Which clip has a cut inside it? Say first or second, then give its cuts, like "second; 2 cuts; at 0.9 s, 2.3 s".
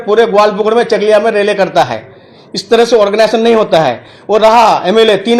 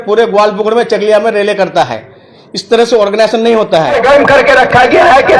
second; 1 cut; at 4.0 s